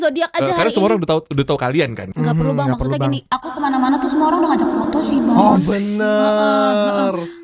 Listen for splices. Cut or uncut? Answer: cut